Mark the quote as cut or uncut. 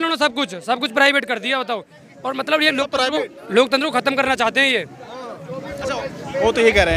uncut